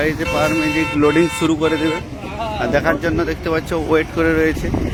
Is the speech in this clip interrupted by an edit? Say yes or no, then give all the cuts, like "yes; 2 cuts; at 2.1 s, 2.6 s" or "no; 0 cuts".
no; 0 cuts